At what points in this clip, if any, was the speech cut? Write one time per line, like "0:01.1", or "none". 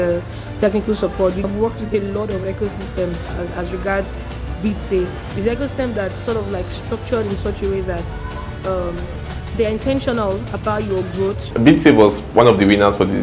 0:01.4
0:11.5